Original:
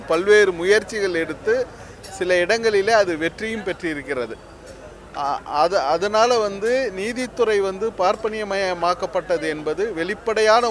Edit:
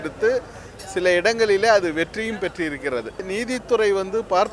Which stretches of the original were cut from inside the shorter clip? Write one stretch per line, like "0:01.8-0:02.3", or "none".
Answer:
0:04.5-0:07.0

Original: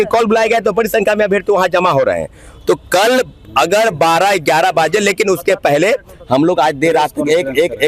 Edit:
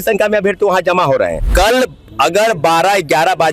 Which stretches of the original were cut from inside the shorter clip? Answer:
0:02.3-0:02.8

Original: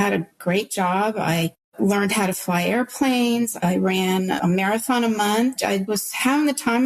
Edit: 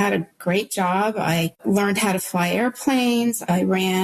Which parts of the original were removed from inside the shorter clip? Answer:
0:01.5-0:01.7

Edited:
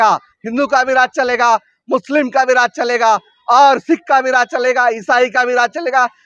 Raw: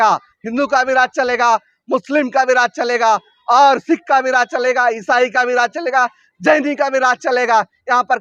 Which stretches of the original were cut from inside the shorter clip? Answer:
none

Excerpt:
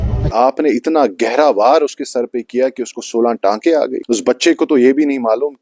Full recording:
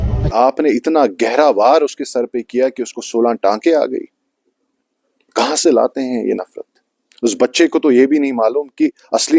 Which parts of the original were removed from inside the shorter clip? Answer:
0:04.0-0:07.1

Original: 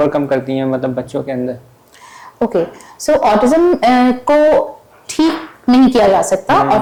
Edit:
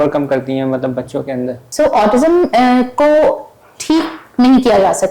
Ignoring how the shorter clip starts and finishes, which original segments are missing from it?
0:01.6-0:02.9

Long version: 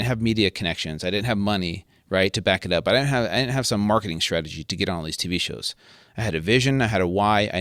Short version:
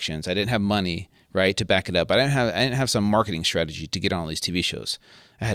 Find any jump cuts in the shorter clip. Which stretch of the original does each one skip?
none

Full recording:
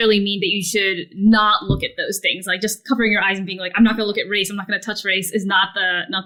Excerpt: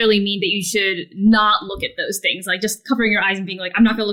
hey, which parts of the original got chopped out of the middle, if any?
none

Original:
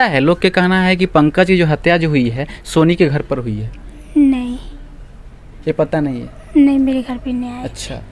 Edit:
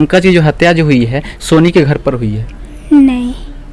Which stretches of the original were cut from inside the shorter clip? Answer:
none

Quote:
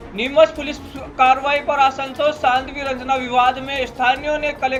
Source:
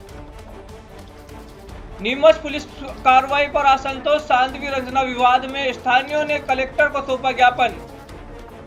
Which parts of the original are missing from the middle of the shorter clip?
none

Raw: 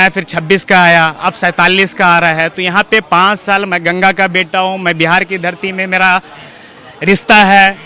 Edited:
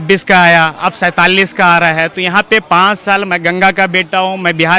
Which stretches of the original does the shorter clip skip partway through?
none

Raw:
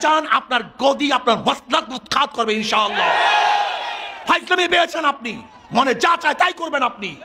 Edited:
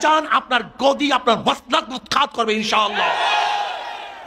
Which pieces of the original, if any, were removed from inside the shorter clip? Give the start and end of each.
none

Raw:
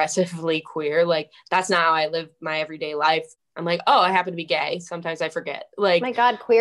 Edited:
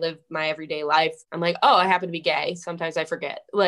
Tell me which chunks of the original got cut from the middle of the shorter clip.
0:03.4-0:03.5

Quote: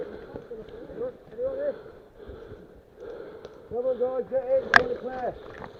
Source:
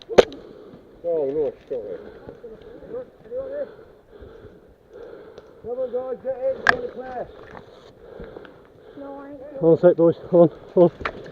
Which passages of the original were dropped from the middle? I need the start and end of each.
none

